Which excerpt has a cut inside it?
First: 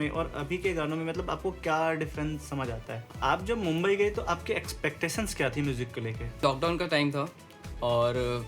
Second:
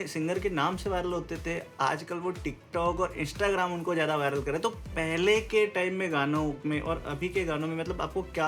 first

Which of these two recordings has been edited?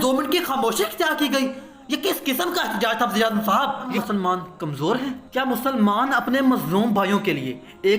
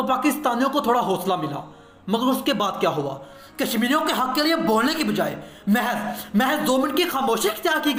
first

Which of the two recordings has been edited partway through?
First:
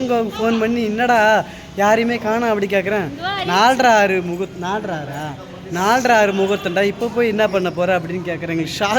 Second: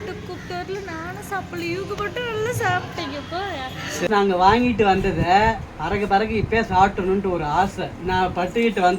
second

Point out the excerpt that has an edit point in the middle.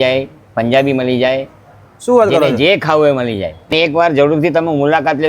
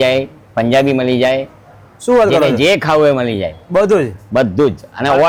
first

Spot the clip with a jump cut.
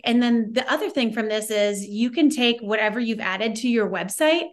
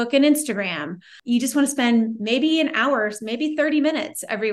second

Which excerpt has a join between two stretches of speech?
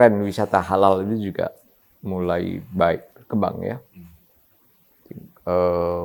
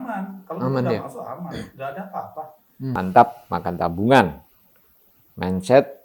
second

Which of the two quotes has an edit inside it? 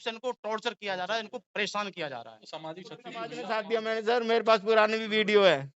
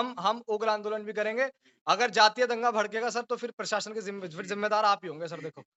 first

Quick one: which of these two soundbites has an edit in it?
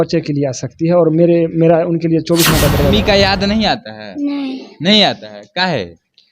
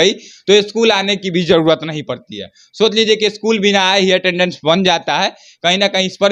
first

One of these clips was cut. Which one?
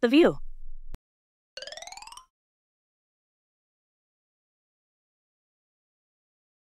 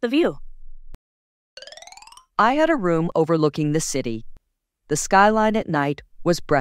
second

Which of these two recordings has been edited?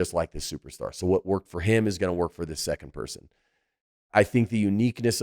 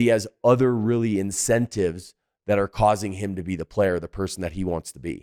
first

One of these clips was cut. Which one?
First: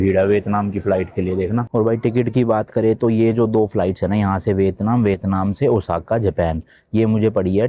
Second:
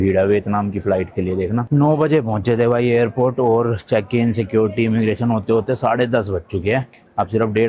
first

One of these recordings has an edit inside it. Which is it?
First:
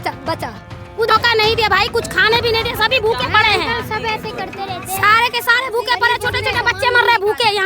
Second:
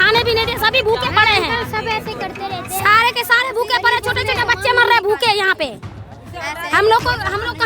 first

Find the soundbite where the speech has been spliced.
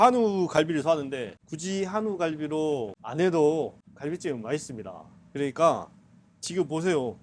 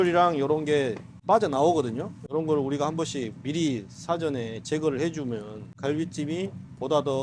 second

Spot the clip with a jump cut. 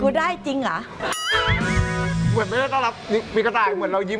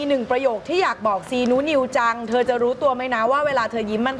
first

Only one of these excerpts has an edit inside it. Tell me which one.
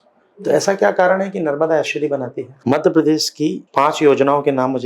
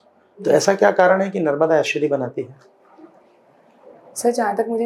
first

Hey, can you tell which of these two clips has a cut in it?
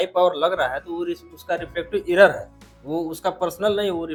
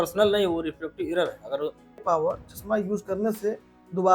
second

